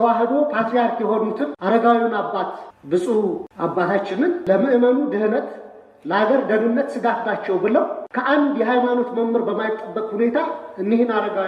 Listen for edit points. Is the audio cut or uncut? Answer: cut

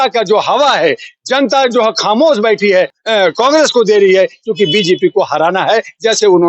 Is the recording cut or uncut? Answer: cut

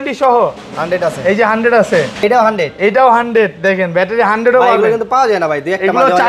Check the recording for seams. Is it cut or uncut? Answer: cut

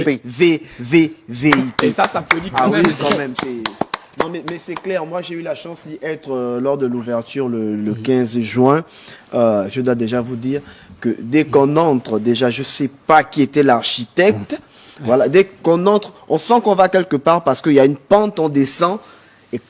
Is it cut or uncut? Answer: uncut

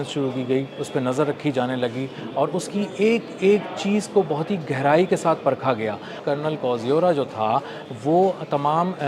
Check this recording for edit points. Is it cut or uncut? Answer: cut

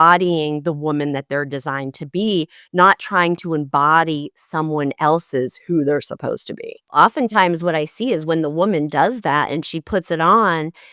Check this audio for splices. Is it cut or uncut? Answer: cut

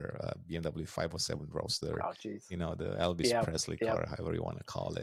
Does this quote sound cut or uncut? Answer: uncut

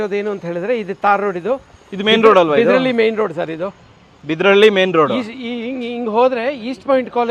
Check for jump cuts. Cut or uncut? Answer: uncut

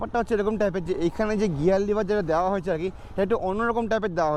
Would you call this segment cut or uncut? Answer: uncut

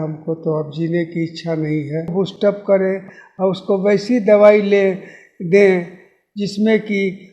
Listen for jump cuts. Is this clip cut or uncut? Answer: cut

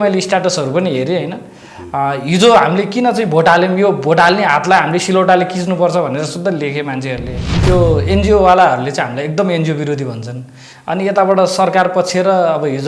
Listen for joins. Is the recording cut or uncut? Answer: cut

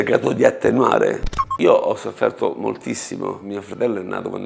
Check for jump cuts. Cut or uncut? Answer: cut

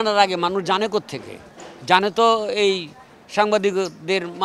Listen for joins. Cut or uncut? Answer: uncut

